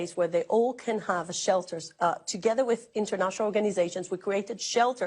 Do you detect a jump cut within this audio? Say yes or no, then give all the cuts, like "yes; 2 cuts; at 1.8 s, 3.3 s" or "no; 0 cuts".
no; 0 cuts